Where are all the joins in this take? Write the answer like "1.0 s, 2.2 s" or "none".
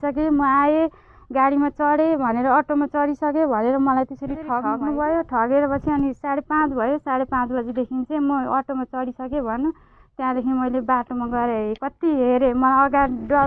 4.5 s